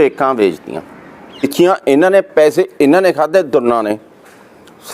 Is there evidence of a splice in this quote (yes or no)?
yes